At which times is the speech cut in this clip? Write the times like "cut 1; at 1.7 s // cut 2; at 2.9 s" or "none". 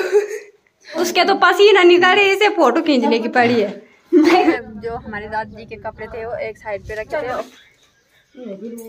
cut 1; at 1.0 s // cut 2; at 4.5 s // cut 3; at 7.4 s